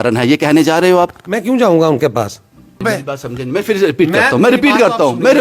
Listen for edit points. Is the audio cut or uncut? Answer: cut